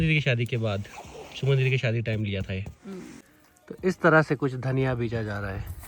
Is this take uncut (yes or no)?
no